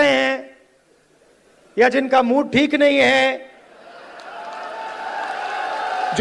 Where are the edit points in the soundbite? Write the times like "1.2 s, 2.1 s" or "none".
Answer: none